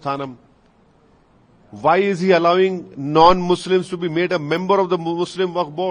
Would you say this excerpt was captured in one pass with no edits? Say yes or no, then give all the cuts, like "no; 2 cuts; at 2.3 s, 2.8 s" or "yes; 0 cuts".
yes; 0 cuts